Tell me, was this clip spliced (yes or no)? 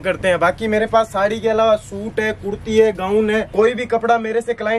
yes